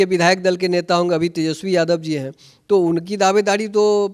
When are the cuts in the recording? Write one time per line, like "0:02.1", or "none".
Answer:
none